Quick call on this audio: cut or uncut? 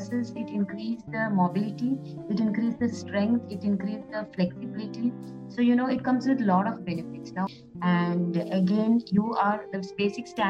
cut